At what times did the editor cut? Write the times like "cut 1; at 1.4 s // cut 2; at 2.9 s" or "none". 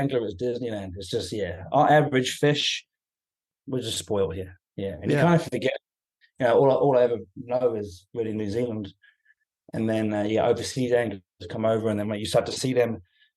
cut 1; at 11.3 s // cut 2; at 12.5 s

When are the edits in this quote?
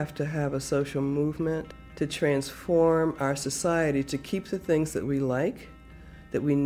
cut 1; at 1.8 s

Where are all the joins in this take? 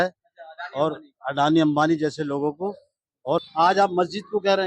cut 1; at 3.4 s

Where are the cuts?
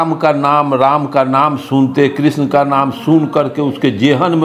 none

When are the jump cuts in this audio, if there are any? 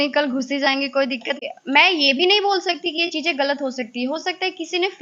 cut 1; at 1.4 s

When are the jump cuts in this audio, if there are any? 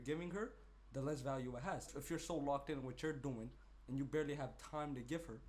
cut 1; at 1.9 s

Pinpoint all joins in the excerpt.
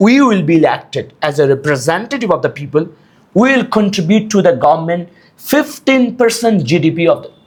none

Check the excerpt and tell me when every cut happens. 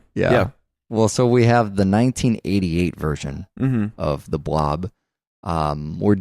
cut 1; at 3.2 s

